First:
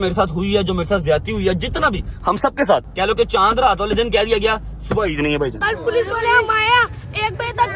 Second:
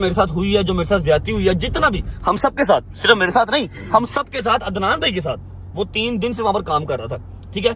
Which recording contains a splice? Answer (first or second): first